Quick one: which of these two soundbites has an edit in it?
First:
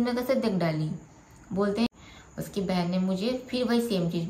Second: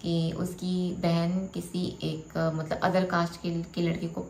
first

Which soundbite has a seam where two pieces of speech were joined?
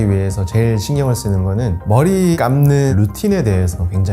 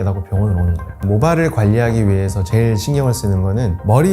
second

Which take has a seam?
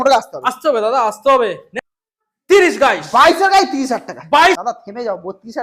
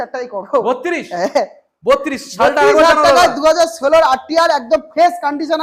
first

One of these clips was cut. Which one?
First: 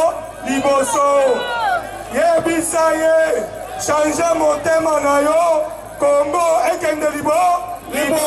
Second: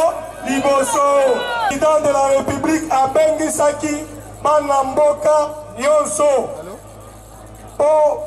second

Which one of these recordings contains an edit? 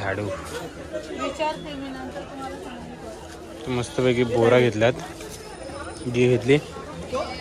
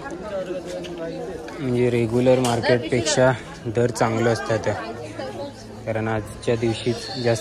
first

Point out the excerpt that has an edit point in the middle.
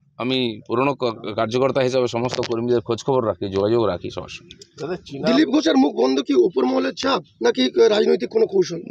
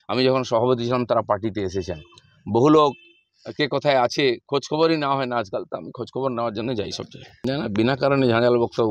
second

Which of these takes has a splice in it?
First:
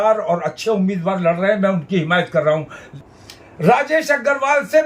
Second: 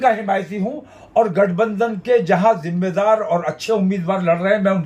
first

